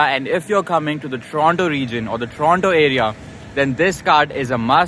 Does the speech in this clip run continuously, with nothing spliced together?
yes; 0 cuts

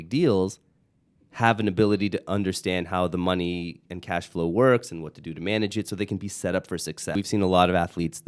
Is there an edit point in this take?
yes; 1 cut; at 7.1 s

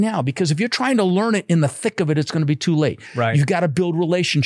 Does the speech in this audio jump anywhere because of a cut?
no; 0 cuts

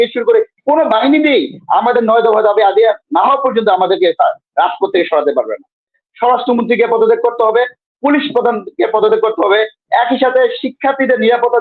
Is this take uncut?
no; 1 cut; at 6.0 s

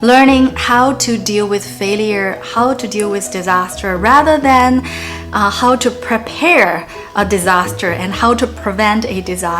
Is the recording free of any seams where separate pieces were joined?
yes; 0 cuts

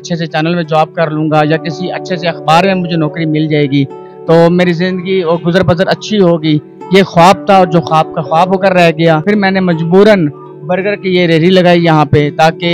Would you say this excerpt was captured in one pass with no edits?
no; 1 cut; at 9.2 s

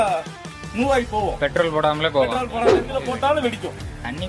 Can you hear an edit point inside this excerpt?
yes; 1 cut; at 2.7 s

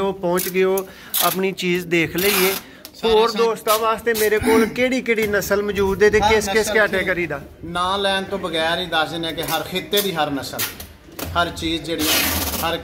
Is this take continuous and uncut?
yes; 0 cuts

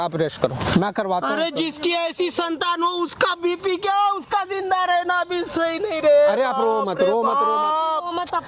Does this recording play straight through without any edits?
yes; 0 cuts

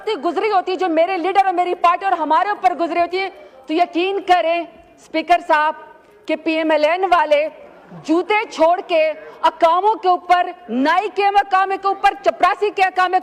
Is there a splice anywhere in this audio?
no; 0 cuts

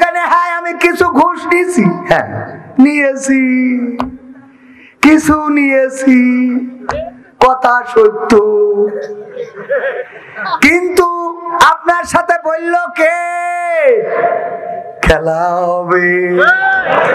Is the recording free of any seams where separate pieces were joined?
yes; 0 cuts

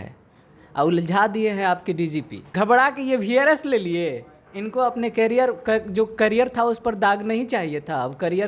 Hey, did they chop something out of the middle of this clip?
yes; 1 cut; at 2.5 s

